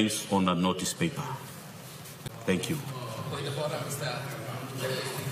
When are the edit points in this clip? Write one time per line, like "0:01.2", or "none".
none